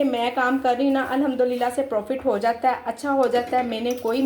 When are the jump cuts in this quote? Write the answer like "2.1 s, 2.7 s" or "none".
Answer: none